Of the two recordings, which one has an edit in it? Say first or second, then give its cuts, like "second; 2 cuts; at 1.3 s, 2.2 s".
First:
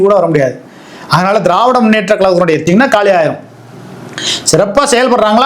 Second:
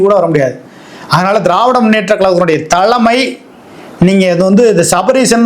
first; 1 cut; at 2.7 s